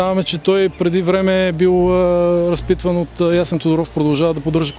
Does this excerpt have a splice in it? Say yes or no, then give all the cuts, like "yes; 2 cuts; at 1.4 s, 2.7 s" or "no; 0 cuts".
no; 0 cuts